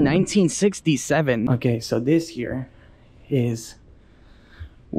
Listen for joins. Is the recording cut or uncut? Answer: cut